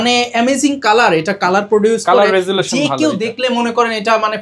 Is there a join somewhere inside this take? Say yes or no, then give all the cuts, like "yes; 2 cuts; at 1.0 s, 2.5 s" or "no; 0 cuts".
no; 0 cuts